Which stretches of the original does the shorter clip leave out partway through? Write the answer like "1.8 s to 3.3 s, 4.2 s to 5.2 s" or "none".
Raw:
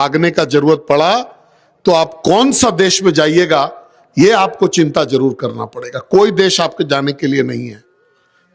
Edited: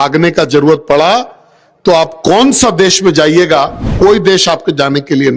3.8 s to 5.9 s